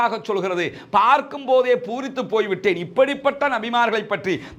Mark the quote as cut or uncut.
uncut